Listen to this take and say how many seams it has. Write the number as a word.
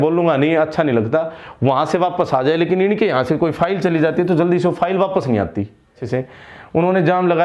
one